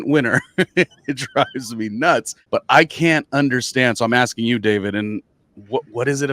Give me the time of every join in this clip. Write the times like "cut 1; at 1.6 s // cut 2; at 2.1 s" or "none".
cut 1; at 2.4 s

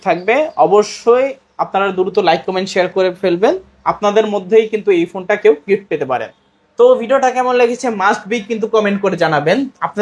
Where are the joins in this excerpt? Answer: none

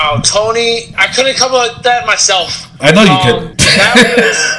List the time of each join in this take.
cut 1; at 1.0 s // cut 2; at 3.5 s

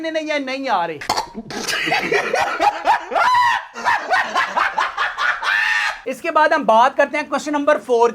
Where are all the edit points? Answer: none

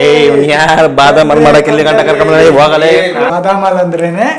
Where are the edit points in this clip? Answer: cut 1; at 3.3 s

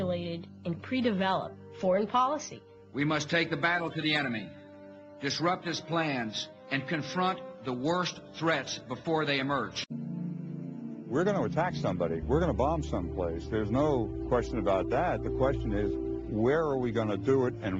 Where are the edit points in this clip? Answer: cut 1; at 9.9 s

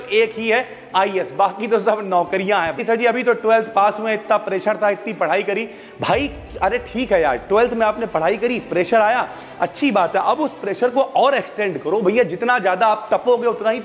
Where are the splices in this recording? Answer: cut 1; at 2.8 s

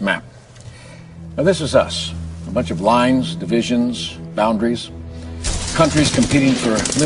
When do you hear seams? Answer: none

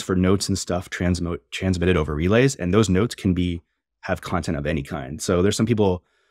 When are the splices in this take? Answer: none

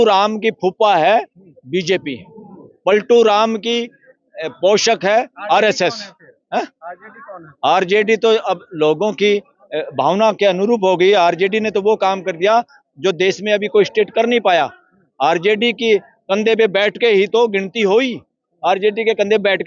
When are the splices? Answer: none

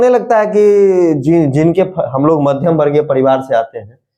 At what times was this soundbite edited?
none

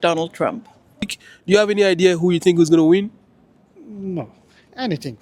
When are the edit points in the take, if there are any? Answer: cut 1; at 1.0 s

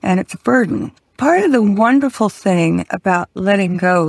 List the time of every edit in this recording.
cut 1; at 1.1 s

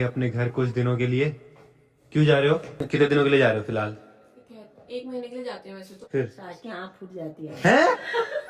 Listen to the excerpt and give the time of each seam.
cut 1; at 2.7 s // cut 2; at 5.9 s

